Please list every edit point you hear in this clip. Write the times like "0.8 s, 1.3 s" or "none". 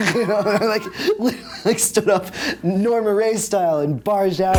none